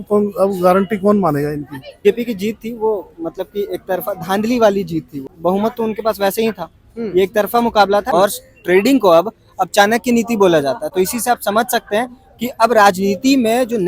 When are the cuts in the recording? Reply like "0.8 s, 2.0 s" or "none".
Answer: 2.0 s, 5.3 s, 8.1 s

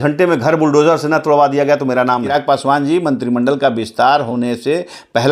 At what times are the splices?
2.3 s

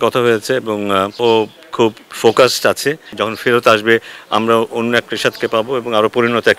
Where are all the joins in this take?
1.2 s, 3.2 s

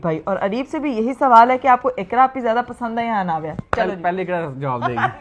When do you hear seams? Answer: none

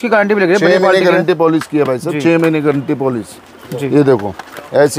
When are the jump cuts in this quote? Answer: none

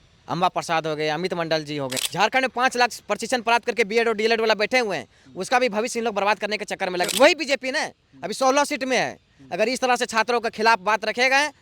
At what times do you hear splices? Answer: 2.0 s, 7.1 s

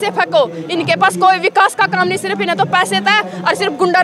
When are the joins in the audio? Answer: none

